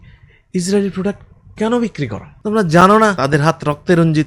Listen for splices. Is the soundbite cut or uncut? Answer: cut